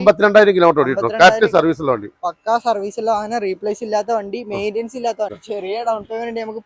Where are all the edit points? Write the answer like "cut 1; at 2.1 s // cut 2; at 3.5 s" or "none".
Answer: cut 1; at 5.3 s